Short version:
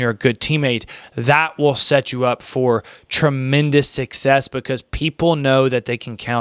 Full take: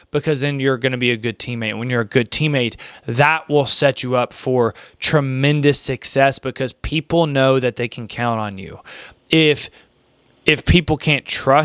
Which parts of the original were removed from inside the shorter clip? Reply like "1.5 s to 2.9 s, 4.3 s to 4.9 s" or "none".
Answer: none